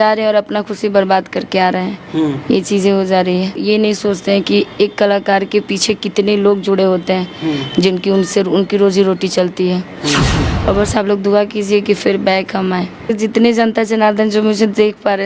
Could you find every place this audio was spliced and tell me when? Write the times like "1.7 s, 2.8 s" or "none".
3.5 s, 10.4 s, 13.1 s